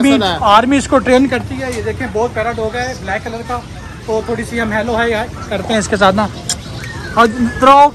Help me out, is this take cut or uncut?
uncut